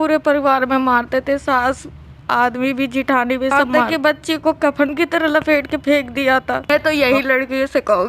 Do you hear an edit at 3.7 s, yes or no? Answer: yes